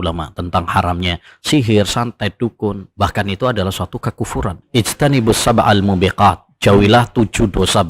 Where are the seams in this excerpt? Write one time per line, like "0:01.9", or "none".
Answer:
0:02.8
0:04.6